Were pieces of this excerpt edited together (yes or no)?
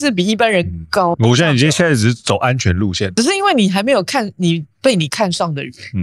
yes